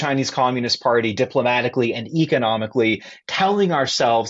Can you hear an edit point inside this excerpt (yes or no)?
no